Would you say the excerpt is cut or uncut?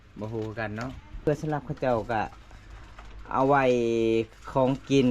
cut